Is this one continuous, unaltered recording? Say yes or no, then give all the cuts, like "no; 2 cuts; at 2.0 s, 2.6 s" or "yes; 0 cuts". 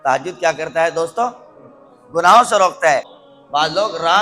no; 1 cut; at 3.2 s